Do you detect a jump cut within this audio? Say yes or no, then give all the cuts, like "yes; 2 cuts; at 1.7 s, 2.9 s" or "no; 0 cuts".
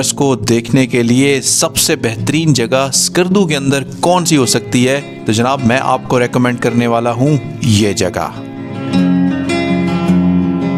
no; 0 cuts